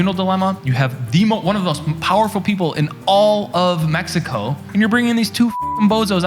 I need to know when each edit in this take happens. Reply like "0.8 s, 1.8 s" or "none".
4.6 s

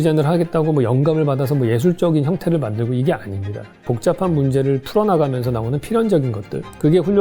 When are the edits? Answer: 3.9 s

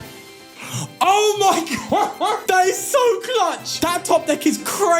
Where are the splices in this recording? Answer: 2.4 s, 3.7 s

